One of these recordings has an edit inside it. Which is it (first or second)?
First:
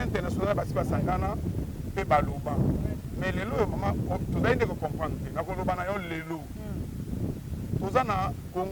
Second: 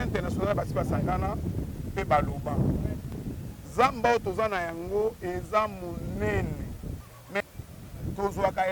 second